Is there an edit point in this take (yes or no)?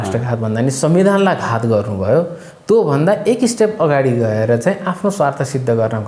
no